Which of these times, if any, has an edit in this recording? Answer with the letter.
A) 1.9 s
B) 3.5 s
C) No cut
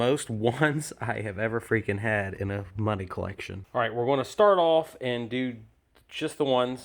B